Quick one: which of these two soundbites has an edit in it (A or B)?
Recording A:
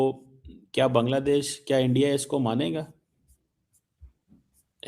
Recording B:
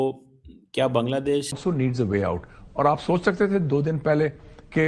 B